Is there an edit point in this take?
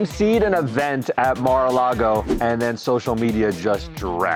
no; 0 cuts

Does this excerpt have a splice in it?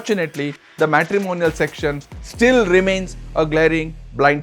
no; 0 cuts

